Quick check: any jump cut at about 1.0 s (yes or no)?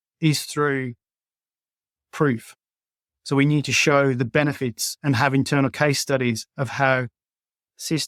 no